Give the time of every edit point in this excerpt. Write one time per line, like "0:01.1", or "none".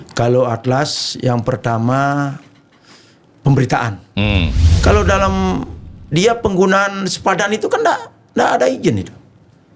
0:04.6